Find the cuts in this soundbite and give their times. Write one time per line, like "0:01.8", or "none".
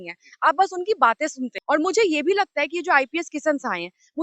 0:01.5